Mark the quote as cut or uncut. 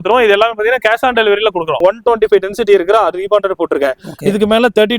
cut